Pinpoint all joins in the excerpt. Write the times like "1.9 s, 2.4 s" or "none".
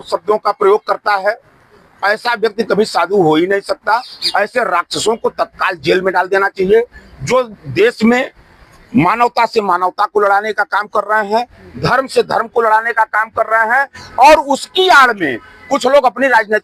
4.2 s